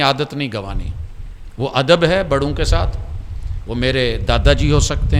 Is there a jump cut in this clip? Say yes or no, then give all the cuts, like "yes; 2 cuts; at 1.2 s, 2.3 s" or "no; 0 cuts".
no; 0 cuts